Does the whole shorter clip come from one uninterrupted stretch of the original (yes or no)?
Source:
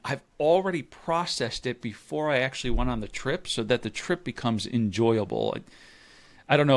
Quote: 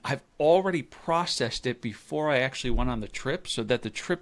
yes